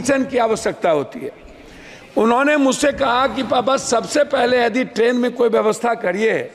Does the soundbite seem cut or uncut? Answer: uncut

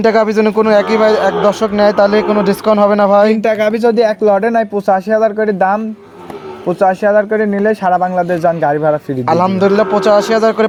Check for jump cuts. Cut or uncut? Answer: uncut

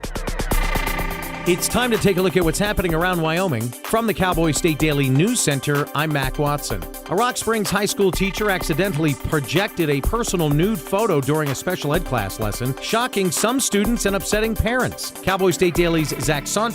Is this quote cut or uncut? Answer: cut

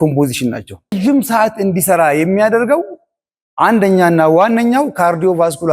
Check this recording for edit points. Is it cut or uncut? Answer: cut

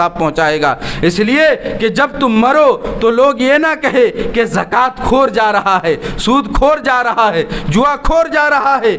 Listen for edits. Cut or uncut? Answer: uncut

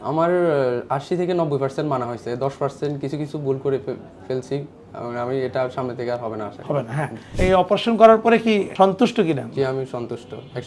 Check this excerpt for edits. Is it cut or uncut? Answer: cut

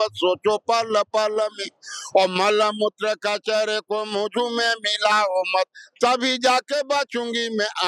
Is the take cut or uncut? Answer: uncut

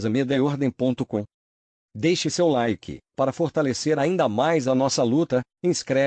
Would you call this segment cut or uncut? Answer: cut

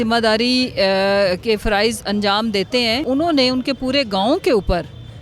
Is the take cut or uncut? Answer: cut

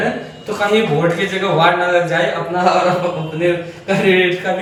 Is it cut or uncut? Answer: uncut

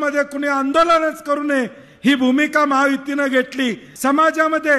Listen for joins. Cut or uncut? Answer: cut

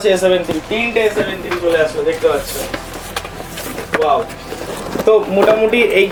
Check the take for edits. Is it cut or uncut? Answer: uncut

